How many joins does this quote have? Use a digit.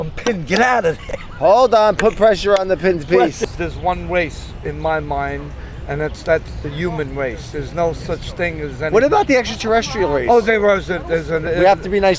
1